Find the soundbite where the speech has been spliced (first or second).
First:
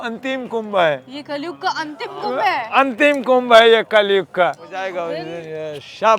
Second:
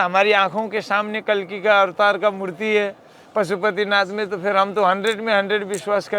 first